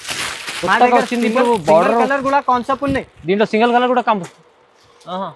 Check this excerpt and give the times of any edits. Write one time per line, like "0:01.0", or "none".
none

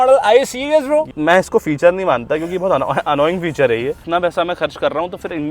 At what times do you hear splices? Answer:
0:01.1
0:04.0

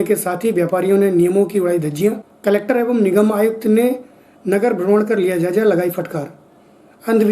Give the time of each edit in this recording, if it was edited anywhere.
0:02.3

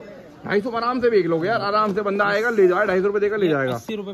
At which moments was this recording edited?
none

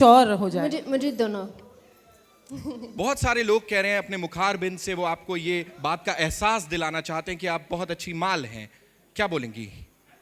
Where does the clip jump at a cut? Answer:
0:02.9

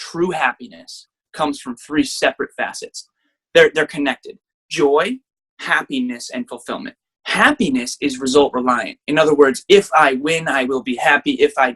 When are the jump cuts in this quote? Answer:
none

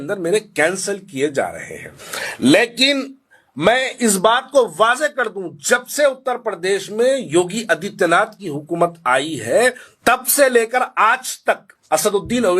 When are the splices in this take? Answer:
0:09.9
0:11.7

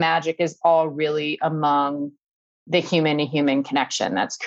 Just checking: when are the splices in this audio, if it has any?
none

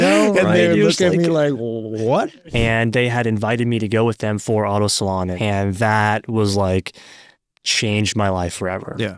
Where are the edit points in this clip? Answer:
0:02.3
0:05.3

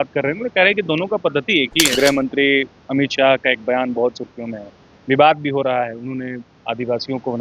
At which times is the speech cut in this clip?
0:01.9

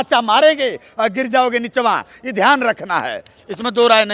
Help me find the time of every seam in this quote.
none

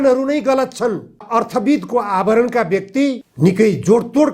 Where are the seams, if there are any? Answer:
0:01.2

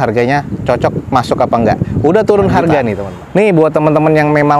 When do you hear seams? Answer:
0:03.2

